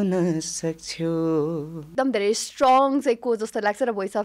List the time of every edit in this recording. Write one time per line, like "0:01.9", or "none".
0:01.8